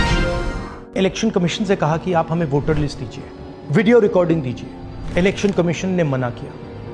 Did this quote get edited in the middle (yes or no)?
yes